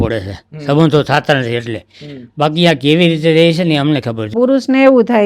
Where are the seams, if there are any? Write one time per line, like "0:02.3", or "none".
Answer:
0:04.3